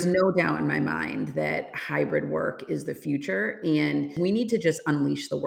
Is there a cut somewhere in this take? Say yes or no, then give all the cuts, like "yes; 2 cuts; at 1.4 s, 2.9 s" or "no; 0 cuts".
yes; 1 cut; at 4.1 s